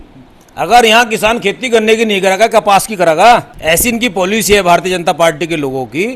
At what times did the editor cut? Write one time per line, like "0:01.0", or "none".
0:03.5